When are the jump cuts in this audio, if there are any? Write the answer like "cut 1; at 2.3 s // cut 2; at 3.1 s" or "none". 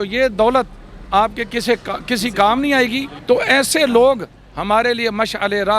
cut 1; at 3.1 s